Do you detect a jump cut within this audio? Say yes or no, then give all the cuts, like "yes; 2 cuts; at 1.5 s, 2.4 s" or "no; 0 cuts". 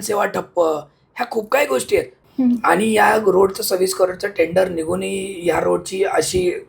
yes; 1 cut; at 2.2 s